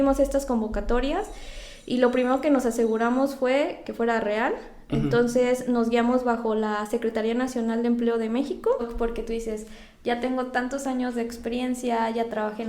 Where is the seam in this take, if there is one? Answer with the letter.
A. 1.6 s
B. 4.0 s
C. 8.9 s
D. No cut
C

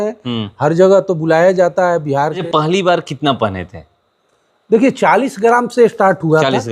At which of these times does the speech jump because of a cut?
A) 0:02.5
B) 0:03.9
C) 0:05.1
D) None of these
A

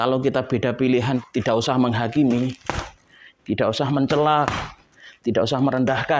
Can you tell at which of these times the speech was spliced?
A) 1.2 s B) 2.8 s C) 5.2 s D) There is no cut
A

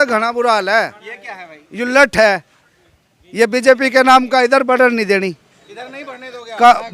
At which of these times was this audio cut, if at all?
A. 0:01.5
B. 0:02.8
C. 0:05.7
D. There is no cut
D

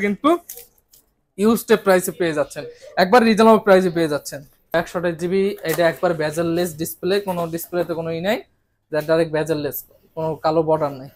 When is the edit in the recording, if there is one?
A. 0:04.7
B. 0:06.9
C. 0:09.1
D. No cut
A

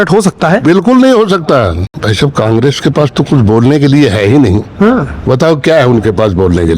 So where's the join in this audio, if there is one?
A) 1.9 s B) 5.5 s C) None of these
A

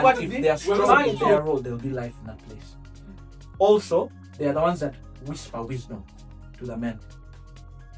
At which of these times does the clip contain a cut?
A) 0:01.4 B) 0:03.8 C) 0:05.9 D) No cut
A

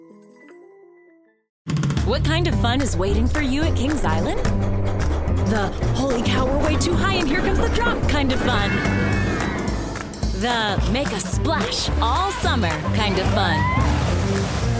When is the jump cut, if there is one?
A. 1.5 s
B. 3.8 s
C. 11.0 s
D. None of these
A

